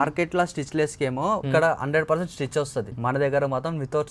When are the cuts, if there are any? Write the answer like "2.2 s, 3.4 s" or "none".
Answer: 1.4 s, 2.9 s